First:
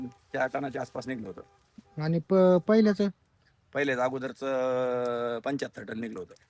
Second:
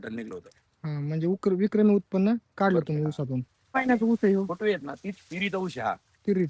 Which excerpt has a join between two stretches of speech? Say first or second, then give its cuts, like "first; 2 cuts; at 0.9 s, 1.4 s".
second; 1 cut; at 3.7 s